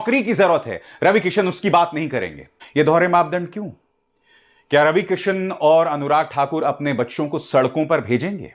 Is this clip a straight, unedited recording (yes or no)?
no